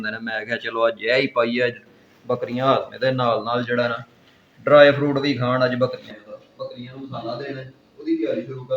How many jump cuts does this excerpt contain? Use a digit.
1